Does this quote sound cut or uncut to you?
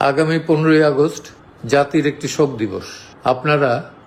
uncut